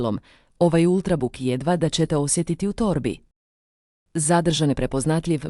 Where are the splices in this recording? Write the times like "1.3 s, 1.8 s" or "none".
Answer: 4.4 s

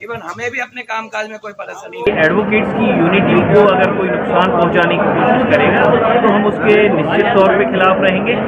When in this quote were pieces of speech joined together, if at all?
2.1 s

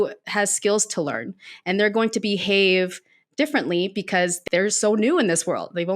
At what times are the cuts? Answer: 4.4 s

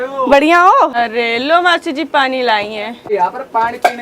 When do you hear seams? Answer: 0.9 s, 3.1 s

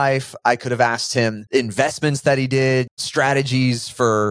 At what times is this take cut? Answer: 3.0 s

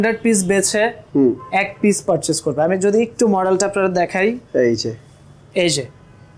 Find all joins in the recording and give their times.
none

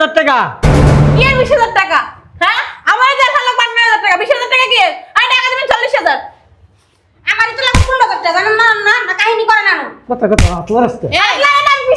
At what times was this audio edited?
none

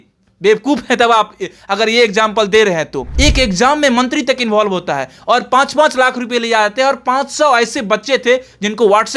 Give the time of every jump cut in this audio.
3.0 s

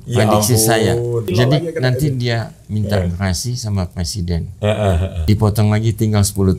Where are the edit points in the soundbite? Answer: 1.3 s, 5.2 s

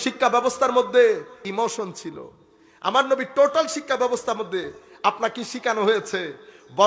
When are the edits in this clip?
1.3 s

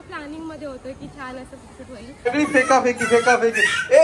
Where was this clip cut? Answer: 2.3 s

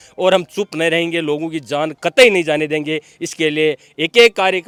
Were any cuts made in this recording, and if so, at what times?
none

